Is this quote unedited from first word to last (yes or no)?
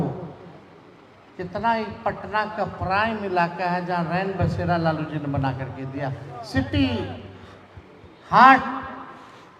yes